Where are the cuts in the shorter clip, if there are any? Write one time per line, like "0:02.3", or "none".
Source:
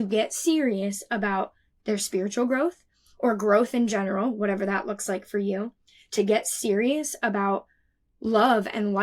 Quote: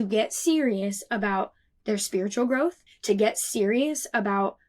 0:02.9